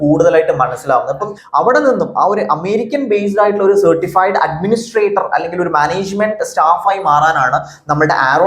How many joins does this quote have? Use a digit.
1